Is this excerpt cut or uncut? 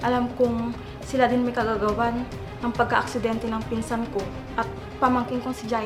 uncut